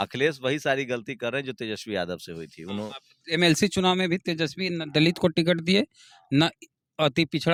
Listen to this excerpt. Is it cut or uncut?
uncut